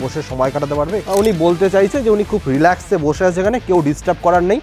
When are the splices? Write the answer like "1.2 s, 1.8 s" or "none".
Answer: 1.0 s